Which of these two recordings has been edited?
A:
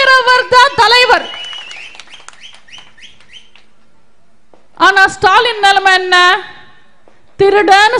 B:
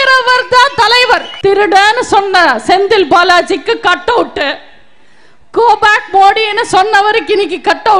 B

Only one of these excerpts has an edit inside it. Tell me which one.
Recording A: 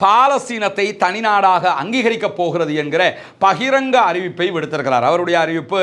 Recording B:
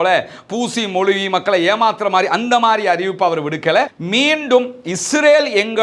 B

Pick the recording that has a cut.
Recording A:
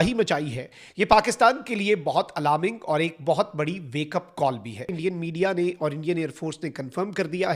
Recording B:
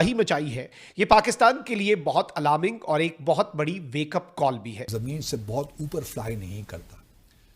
B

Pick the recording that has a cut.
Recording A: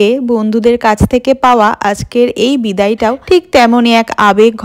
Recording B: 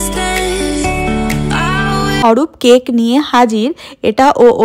B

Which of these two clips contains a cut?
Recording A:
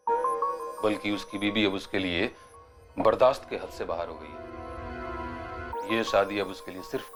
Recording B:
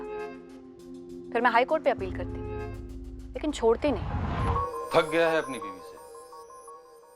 B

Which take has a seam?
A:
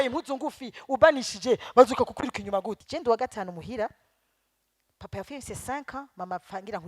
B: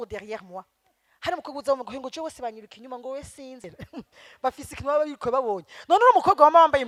A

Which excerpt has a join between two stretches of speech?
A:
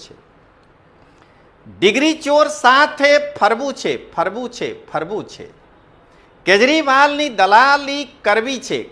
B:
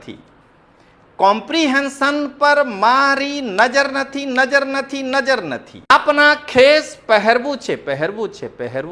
B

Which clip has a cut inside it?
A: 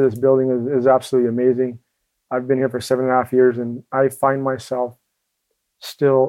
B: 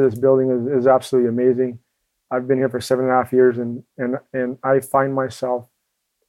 A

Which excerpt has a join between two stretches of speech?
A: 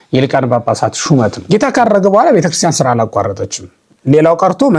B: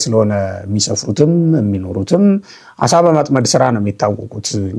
A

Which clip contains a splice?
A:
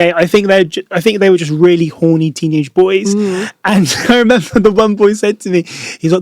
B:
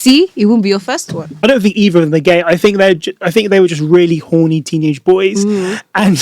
B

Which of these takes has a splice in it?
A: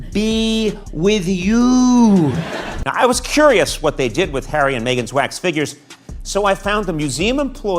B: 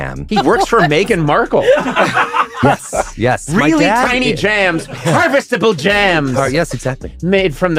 A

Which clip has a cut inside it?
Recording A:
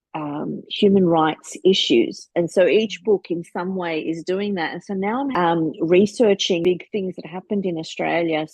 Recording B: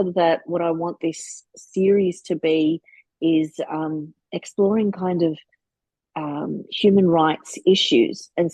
A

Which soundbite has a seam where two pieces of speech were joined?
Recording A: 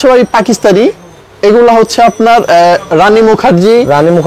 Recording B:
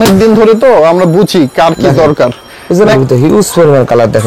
B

